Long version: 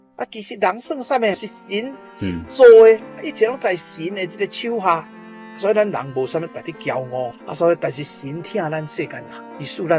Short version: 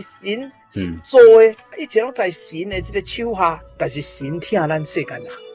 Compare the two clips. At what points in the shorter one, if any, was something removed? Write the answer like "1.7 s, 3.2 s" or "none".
3.8 s

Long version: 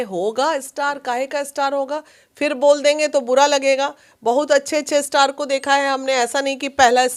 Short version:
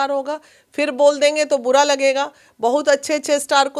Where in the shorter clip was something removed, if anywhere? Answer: none

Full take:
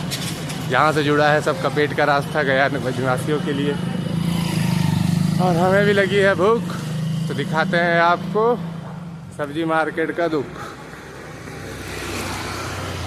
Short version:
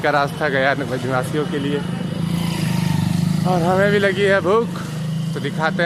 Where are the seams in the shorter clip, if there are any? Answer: none

